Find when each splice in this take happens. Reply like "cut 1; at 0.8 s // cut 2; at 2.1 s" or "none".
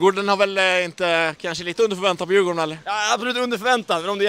cut 1; at 2.8 s